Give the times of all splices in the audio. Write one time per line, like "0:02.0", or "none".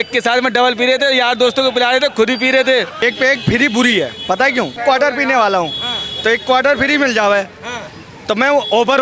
0:03.0
0:04.8